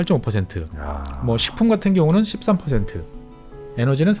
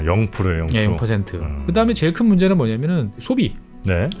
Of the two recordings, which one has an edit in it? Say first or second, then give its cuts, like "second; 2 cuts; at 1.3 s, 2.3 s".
second; 1 cut; at 3.2 s